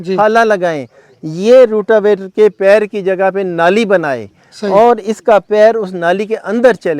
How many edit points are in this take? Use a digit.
0